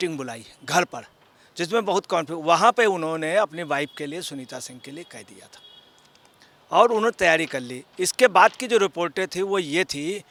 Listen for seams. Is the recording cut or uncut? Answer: uncut